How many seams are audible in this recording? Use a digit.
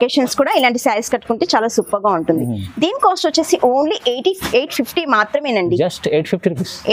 0